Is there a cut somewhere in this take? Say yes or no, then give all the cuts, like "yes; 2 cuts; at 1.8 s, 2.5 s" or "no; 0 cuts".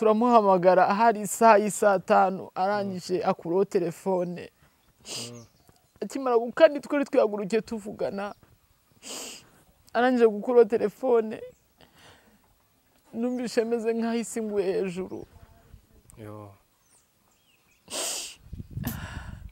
no; 0 cuts